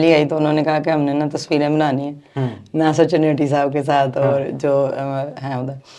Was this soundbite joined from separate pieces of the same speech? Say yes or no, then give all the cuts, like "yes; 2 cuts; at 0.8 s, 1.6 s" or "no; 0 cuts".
no; 0 cuts